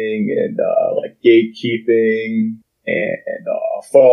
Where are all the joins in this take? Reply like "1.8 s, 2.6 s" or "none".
2.7 s